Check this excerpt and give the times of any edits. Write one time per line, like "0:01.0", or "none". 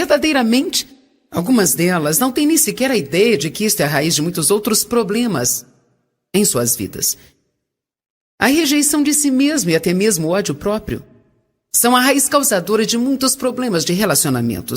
0:13.6